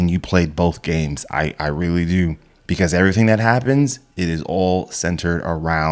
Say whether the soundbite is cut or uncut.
uncut